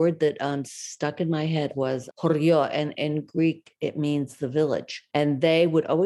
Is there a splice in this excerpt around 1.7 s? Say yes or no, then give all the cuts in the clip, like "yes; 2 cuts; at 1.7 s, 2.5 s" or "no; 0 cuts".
yes; 2 cuts; at 1.7 s, 5.0 s